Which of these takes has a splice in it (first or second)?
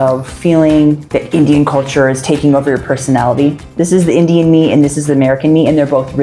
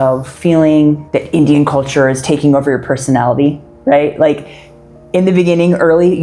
first